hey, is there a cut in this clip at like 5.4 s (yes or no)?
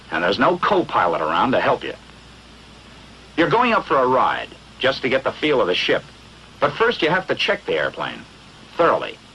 no